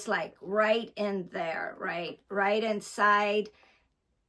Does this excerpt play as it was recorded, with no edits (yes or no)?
yes